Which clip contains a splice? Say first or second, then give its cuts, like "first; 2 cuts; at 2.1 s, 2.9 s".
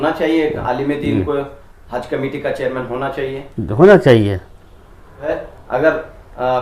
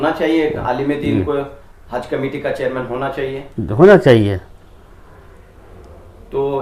first; 1 cut; at 5.3 s